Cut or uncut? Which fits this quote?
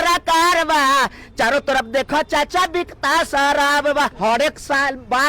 cut